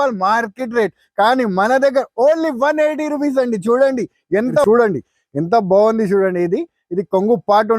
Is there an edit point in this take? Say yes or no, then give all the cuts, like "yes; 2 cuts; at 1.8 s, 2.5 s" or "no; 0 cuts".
yes; 1 cut; at 4.6 s